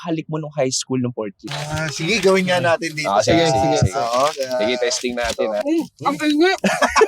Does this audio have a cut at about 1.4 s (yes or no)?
yes